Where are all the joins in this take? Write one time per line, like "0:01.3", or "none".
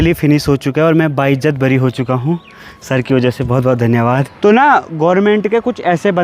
0:04.3